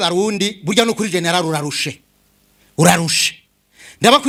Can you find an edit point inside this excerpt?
no; 0 cuts

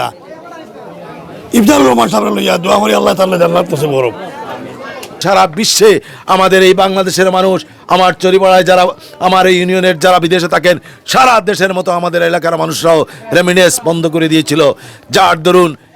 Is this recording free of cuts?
no; 1 cut; at 5.2 s

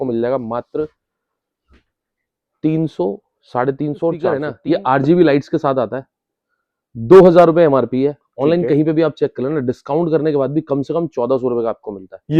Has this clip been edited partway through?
yes; 1 cut; at 4.5 s

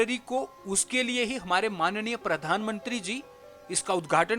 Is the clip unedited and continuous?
yes; 0 cuts

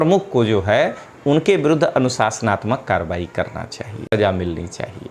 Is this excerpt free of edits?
no; 1 cut; at 4.2 s

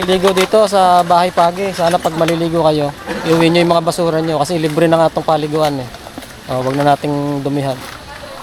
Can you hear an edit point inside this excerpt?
no; 0 cuts

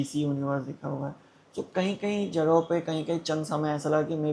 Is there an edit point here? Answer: no; 0 cuts

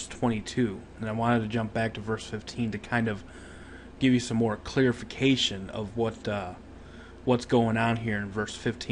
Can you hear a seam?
yes; 1 cut; at 3.0 s

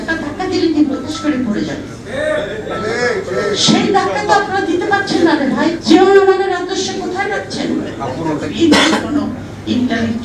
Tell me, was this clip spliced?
yes; 3 cuts; at 1.1 s, 5.8 s, 8.5 s

